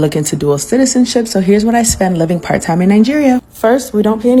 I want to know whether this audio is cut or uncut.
uncut